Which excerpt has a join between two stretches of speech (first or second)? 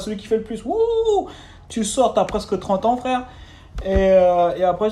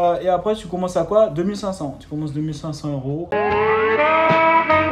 second